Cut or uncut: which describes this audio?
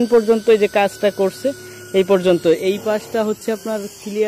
uncut